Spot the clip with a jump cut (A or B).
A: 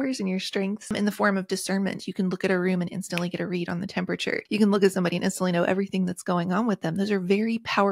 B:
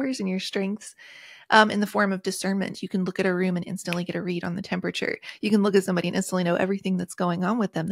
A